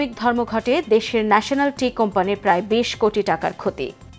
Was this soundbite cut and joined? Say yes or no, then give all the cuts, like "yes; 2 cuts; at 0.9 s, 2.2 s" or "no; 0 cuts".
no; 0 cuts